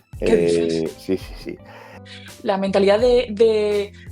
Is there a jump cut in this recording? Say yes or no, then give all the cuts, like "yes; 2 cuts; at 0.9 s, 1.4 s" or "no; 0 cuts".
yes; 1 cut; at 2.0 s